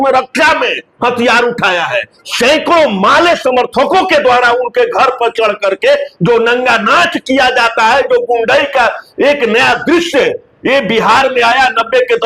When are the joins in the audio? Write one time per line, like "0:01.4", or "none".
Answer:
0:02.2